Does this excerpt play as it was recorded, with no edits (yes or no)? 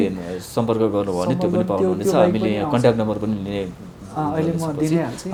yes